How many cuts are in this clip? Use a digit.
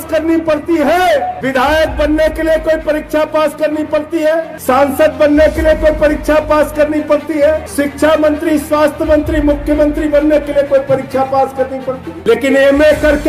4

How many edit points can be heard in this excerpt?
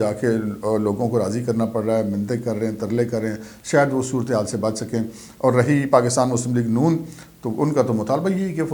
0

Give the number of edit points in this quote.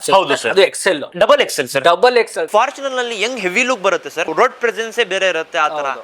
3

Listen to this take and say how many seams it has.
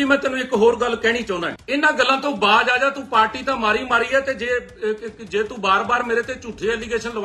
1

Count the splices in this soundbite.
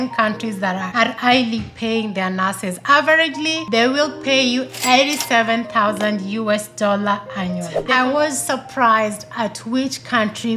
1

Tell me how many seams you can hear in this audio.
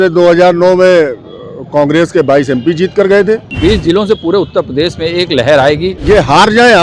2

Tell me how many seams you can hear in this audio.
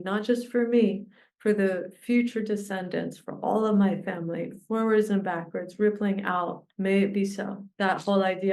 2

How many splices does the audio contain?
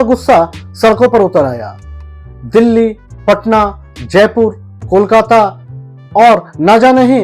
0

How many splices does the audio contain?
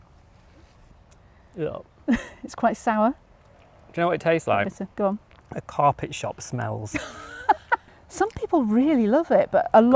2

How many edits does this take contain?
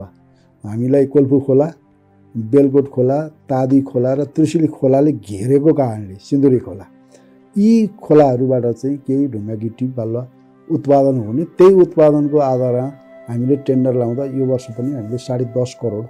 0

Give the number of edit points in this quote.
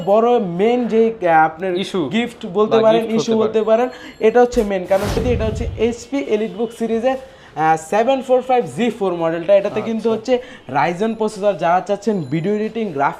1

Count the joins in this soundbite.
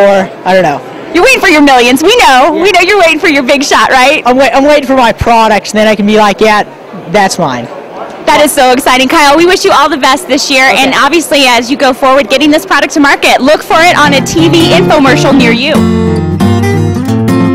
1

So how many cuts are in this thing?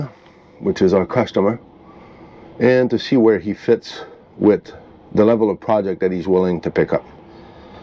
0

